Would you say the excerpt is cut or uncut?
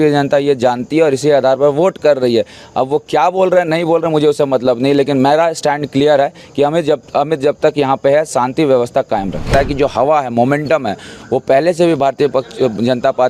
cut